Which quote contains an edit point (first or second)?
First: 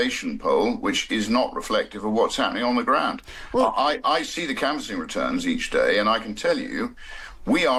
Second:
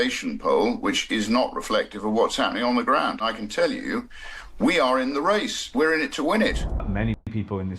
second